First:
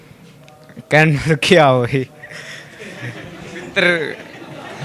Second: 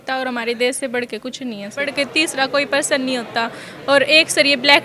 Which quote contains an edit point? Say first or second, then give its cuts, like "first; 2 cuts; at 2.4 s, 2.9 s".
second; 1 cut; at 1.9 s